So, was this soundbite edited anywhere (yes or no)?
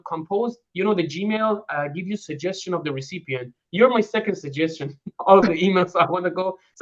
no